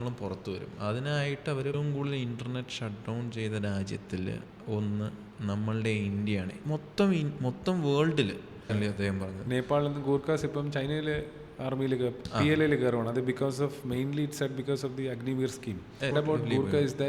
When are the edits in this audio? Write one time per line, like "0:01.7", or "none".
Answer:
0:01.8
0:08.7
0:16.1